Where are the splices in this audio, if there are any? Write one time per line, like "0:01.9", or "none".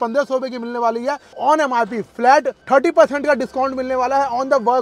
0:01.4
0:02.6